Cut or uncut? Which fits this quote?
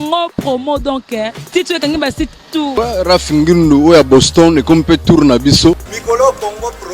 cut